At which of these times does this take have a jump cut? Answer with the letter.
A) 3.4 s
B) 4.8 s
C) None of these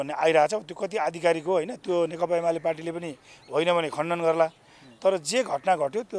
C